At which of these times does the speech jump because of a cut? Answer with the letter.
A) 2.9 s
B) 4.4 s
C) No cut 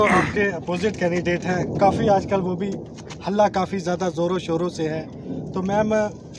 C